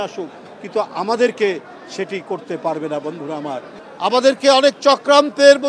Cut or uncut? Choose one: cut